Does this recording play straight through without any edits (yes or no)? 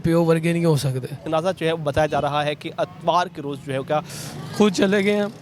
no